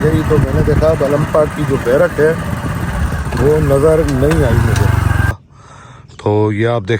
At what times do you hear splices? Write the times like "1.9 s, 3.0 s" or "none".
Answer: 5.4 s

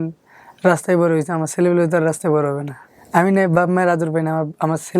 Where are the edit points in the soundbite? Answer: 2.9 s

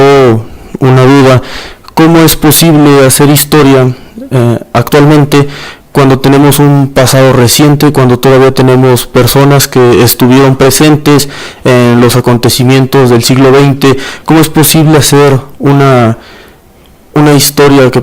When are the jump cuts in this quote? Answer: 6.3 s

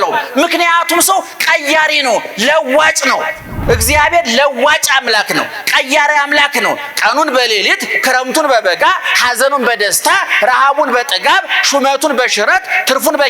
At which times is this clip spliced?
3.5 s

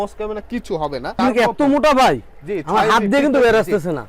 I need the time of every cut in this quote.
1.1 s

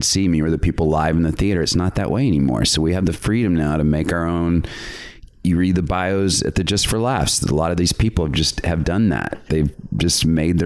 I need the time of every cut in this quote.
none

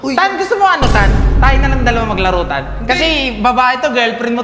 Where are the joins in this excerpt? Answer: none

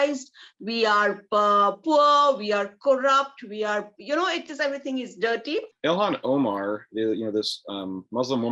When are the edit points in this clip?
5.7 s

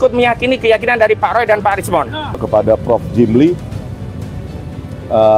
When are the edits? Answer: 2.4 s

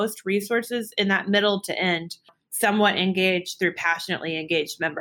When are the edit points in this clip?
2.4 s

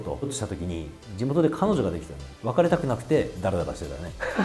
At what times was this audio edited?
none

